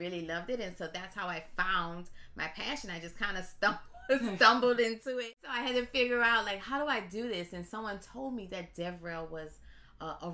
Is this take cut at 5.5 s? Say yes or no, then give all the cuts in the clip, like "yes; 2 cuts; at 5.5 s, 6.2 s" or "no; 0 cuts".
yes; 1 cut; at 5.5 s